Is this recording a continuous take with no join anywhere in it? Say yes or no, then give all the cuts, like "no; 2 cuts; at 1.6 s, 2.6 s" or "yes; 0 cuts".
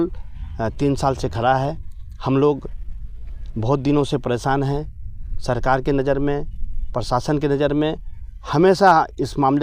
yes; 0 cuts